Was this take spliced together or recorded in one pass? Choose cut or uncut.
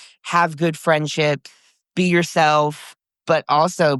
cut